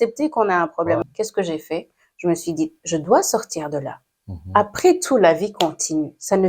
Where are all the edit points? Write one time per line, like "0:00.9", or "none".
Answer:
0:01.1